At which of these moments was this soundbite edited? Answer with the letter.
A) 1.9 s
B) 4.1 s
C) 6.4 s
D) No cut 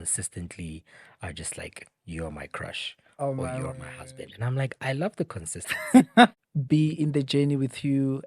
C